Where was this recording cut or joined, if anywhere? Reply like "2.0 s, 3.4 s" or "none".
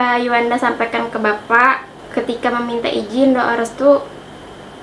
1.9 s